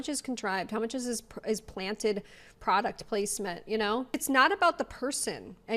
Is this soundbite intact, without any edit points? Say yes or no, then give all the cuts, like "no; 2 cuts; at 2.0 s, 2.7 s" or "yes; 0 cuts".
no; 1 cut; at 4.1 s